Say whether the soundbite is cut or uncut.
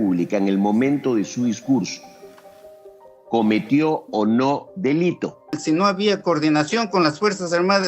cut